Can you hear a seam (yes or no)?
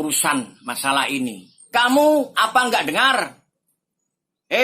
yes